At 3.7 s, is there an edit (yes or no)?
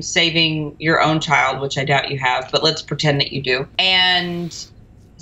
yes